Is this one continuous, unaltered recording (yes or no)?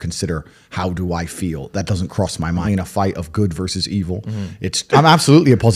no